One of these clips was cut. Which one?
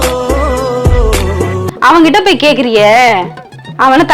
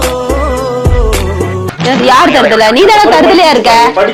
first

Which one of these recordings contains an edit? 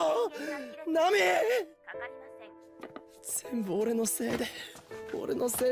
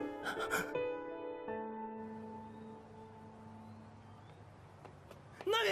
second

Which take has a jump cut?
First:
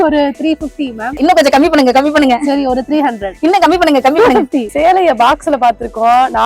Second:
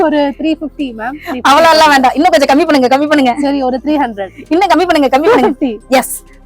first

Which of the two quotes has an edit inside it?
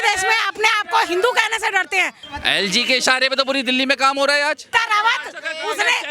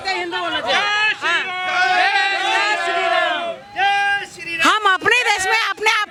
first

